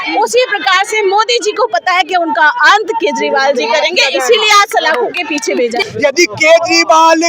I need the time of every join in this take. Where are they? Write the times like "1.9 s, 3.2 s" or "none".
5.8 s